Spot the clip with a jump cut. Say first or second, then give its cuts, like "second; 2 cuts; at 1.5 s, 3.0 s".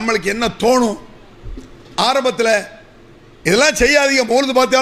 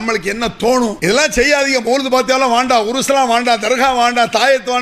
second; 1 cut; at 1.0 s